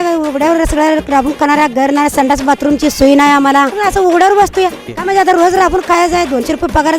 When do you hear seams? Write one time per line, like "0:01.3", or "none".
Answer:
0:03.7
0:04.9